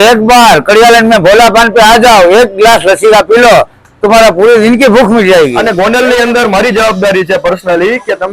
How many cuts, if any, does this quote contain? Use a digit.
1